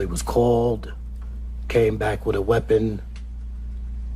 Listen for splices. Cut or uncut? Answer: uncut